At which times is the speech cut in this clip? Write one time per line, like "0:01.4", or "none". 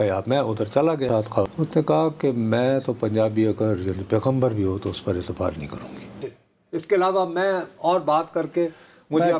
0:01.5
0:06.2